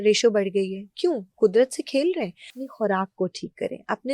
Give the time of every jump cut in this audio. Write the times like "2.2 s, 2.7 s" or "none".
2.6 s